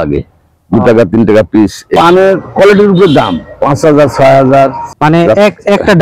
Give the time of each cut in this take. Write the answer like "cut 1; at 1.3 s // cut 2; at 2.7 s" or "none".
cut 1; at 1.9 s // cut 2; at 4.8 s